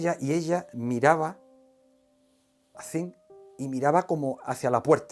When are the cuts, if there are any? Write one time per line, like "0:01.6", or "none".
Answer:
none